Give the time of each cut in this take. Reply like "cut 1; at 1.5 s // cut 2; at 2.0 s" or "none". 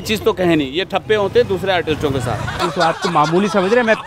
none